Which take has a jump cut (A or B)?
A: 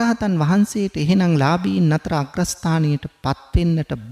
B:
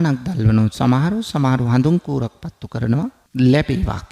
B